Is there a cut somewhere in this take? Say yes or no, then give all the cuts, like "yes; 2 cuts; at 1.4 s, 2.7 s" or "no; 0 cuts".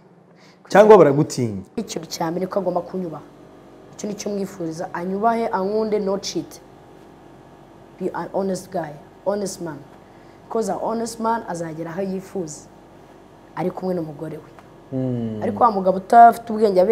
yes; 1 cut; at 1.8 s